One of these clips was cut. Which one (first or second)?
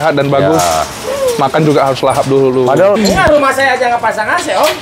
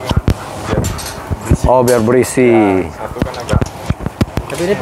first